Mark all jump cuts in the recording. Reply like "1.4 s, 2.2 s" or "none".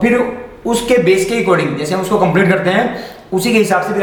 none